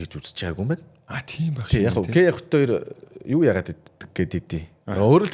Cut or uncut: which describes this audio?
uncut